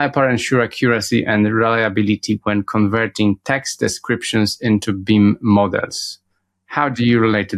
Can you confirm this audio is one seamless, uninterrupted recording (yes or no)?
yes